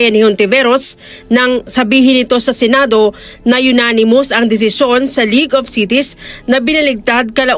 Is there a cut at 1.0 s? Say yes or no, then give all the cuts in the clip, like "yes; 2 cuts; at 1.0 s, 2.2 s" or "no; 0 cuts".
no; 1 cut; at 2.4 s